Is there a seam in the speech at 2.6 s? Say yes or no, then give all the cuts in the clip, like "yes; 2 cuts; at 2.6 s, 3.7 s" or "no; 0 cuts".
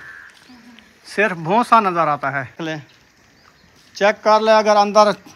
yes; 1 cut; at 2.6 s